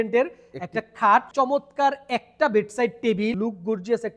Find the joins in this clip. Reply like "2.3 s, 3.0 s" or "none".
1.3 s, 3.3 s